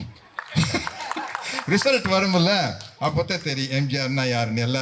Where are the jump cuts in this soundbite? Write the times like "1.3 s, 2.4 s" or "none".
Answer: none